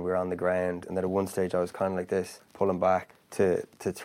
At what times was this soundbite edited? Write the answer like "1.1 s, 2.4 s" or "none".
0.8 s, 2.4 s, 3.2 s